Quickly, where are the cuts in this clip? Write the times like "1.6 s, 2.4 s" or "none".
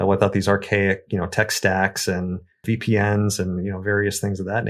2.5 s